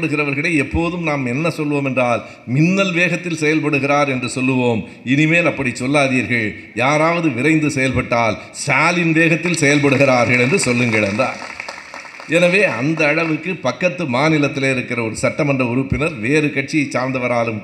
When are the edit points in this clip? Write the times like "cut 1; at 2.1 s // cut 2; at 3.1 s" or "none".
none